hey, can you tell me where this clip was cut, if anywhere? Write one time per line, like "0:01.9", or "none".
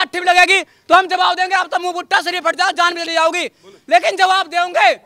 none

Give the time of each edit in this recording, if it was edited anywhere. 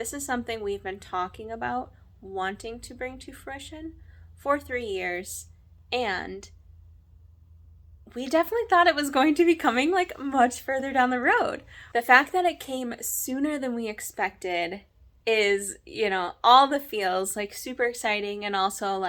none

